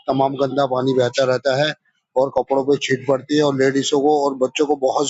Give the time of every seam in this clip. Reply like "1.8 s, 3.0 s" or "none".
none